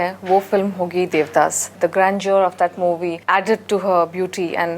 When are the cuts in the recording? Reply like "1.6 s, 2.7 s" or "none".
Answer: 1.7 s, 3.2 s